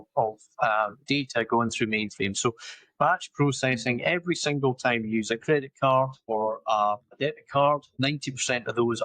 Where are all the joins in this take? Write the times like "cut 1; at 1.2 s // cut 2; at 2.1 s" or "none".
cut 1; at 1.0 s // cut 2; at 6.2 s // cut 3; at 7.2 s // cut 4; at 7.9 s